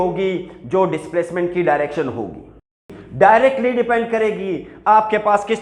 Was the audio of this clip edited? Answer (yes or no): yes